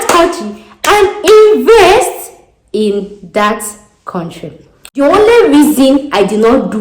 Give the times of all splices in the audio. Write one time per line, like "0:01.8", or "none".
0:05.0